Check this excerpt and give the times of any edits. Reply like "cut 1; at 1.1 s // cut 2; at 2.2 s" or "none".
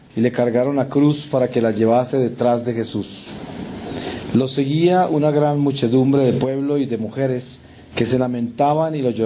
none